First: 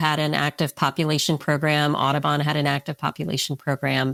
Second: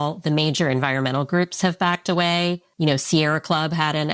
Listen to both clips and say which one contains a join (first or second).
second